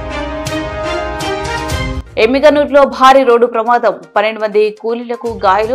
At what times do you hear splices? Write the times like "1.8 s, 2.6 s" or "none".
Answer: 2.0 s